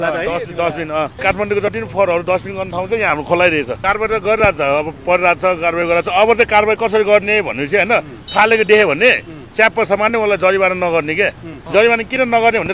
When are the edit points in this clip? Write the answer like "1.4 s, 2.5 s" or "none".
1.2 s, 3.8 s, 11.5 s